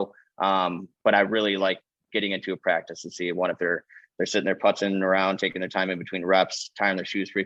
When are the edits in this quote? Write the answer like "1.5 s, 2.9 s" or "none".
none